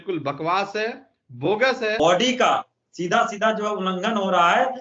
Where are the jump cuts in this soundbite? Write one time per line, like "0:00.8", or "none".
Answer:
0:02.0